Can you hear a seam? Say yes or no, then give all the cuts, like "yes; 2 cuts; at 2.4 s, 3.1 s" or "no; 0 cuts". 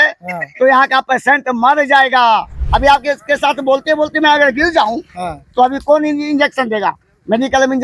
yes; 1 cut; at 2.6 s